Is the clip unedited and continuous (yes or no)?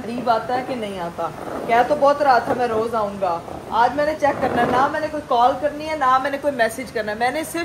yes